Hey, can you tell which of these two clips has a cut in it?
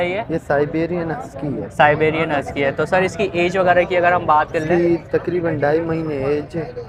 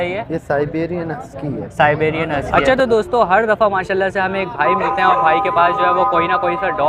second; 1 cut; at 2.5 s

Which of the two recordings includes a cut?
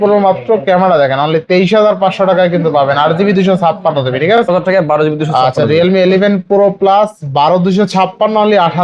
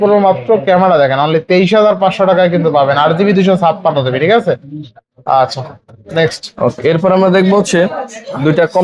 first; 1 cut; at 4.5 s

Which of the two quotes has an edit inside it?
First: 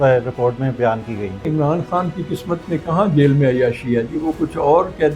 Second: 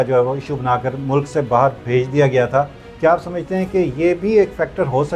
first; 1 cut; at 1.5 s

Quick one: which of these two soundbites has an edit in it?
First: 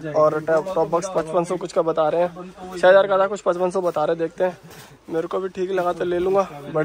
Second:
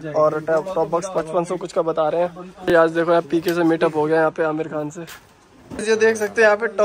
second; 2 cuts; at 2.5 s, 5.8 s

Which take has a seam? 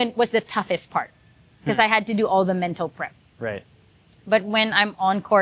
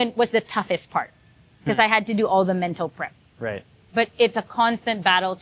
second; 1 cut; at 3.8 s

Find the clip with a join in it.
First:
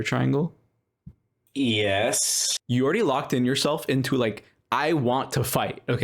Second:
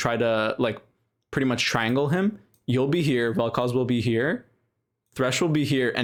first; 1 cut; at 2.7 s

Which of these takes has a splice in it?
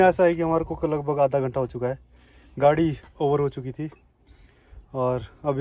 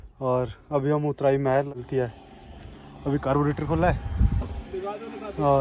second; 1 cut; at 1.8 s

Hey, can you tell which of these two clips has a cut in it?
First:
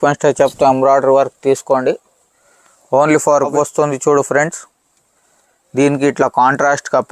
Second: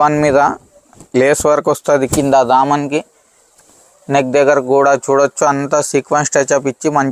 first; 1 cut; at 3.5 s

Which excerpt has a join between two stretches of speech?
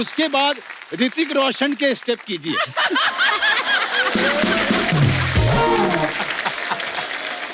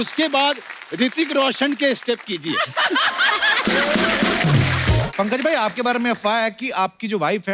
second; 2 cuts; at 3.6 s, 5.0 s

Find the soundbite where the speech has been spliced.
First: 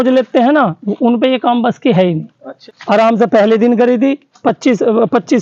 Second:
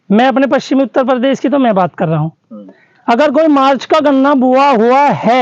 first; 1 cut; at 2.6 s

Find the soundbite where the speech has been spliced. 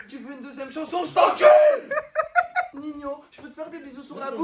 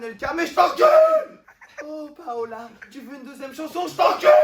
first; 1 cut; at 2.7 s

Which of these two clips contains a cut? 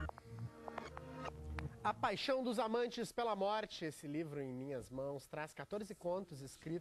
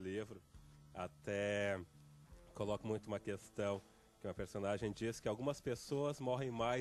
first; 1 cut; at 1.7 s

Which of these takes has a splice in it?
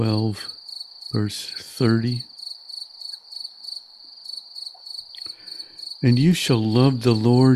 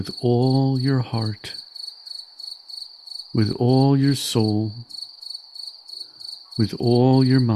second; 4 cuts; at 1.6 s, 3.3 s, 4.9 s, 6.6 s

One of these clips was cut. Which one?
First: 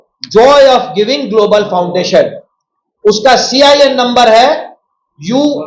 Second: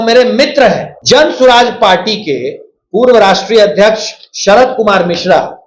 second; 1 cut; at 0.9 s

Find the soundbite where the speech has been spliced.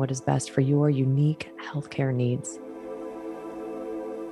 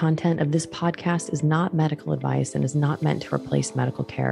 first; 1 cut; at 2.5 s

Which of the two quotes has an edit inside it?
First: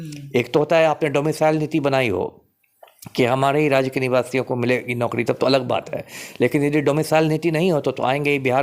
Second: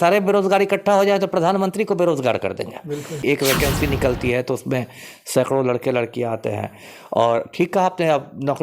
second; 1 cut; at 3.2 s

